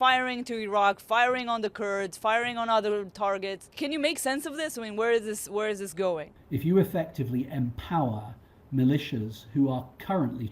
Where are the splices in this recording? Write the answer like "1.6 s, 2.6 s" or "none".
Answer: 3.7 s, 6.4 s